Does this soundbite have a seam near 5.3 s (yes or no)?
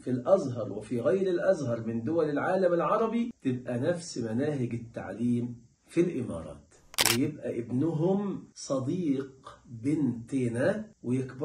no